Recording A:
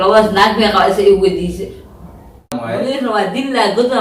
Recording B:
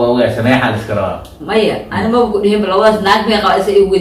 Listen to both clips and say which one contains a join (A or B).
A